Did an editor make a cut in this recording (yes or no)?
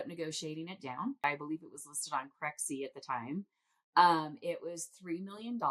yes